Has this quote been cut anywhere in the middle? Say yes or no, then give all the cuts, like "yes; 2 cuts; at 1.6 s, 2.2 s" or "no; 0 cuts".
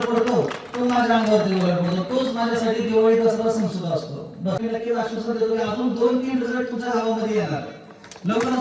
yes; 1 cut; at 4.6 s